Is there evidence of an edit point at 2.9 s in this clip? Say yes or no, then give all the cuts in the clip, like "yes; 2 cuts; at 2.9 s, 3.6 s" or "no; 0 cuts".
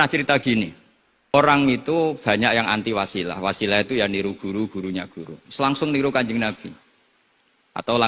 no; 1 cut; at 1.3 s